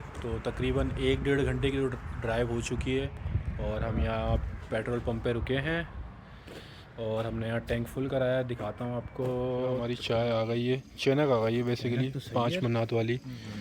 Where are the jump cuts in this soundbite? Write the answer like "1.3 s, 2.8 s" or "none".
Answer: 9.8 s